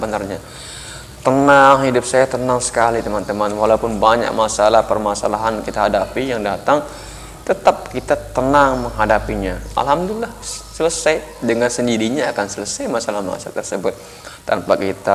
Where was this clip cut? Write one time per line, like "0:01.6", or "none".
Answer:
none